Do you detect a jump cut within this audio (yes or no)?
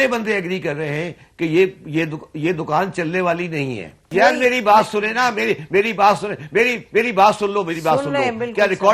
yes